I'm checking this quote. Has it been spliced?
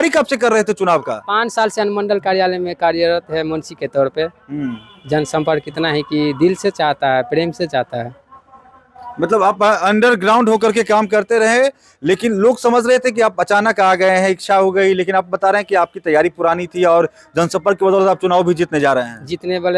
no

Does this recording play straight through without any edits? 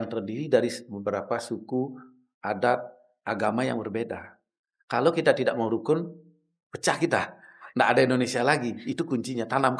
yes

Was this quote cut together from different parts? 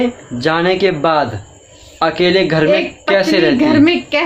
no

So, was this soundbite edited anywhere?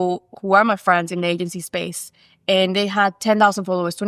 no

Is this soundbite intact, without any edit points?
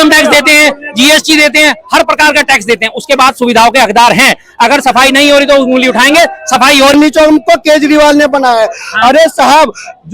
no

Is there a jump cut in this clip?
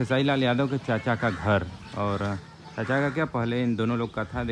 no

